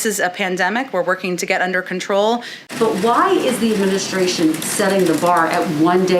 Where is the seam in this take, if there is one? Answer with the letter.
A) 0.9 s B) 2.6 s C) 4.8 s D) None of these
B